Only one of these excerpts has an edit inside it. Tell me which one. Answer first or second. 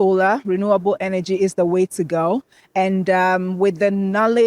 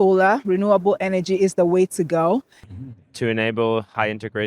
second